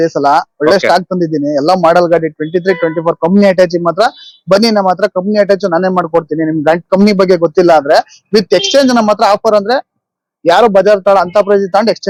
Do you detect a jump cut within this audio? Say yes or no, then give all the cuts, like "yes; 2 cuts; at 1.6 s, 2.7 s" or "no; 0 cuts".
no; 0 cuts